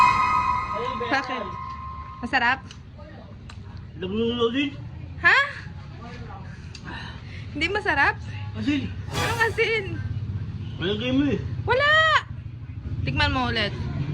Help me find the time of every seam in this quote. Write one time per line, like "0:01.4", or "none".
0:01.0